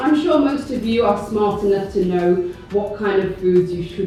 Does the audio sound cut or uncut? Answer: uncut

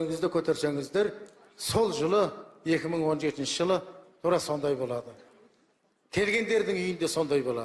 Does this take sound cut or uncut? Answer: uncut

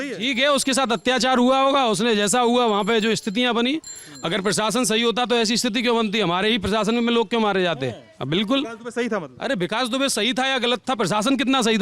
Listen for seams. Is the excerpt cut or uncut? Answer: uncut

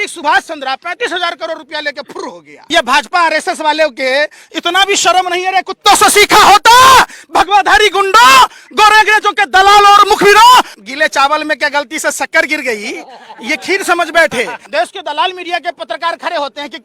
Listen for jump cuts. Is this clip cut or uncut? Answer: cut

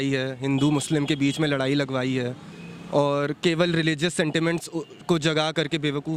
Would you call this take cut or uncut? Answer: uncut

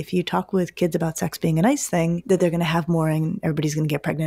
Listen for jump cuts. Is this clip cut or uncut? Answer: cut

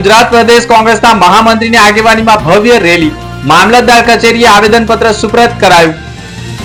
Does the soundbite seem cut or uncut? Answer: uncut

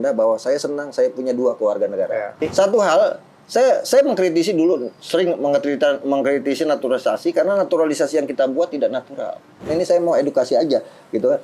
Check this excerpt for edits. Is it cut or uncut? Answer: cut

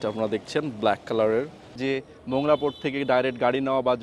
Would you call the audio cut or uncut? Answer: cut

